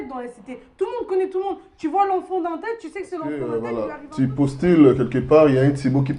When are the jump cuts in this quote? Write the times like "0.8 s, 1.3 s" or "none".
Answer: 3.2 s